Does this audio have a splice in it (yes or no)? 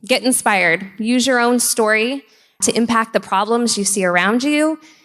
no